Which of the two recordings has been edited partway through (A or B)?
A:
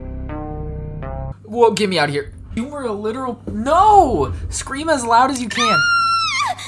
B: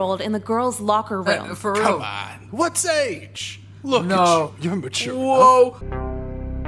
A